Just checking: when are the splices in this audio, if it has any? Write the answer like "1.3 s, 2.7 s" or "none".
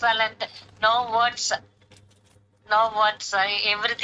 none